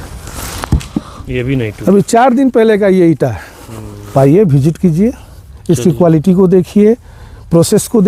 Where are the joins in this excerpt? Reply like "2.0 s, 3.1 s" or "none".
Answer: 4.1 s